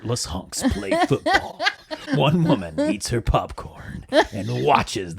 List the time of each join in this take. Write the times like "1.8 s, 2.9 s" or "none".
2.0 s